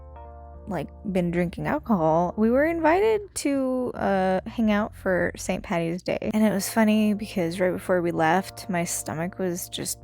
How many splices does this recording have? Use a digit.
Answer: 1